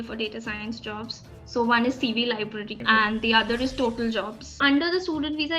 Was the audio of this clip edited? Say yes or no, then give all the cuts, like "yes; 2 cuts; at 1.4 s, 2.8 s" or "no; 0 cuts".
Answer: yes; 2 cuts; at 2.7 s, 4.5 s